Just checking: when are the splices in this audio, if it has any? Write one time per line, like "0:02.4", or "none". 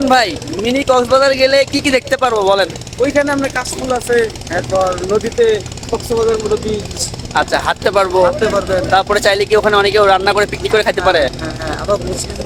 none